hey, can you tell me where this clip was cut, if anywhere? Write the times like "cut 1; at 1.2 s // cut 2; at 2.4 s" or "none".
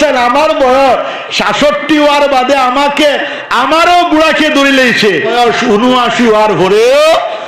cut 1; at 5.3 s